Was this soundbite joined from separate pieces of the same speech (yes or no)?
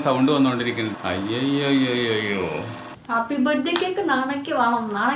yes